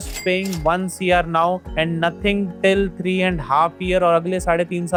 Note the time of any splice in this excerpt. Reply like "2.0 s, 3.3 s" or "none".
none